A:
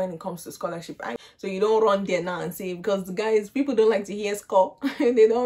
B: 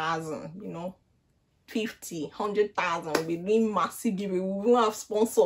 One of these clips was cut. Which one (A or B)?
A